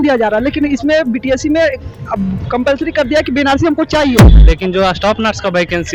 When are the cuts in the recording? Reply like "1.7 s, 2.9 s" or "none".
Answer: 4.2 s